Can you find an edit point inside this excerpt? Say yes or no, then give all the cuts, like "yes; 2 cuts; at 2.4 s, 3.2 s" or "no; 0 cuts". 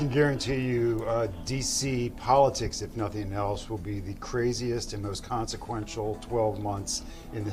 no; 0 cuts